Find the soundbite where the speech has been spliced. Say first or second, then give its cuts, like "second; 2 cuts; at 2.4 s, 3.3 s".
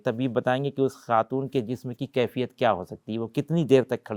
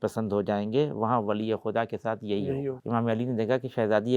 second; 1 cut; at 2.8 s